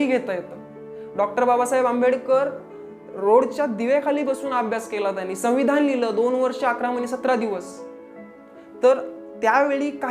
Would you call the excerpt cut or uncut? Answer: uncut